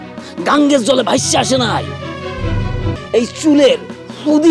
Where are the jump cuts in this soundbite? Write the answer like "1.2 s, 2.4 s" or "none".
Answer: 3.0 s